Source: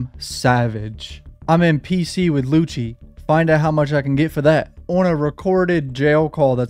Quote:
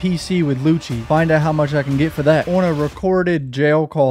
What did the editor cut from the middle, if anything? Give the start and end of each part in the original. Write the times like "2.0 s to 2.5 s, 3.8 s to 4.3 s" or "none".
2.8 s to 3.1 s, 4.6 s to 4.9 s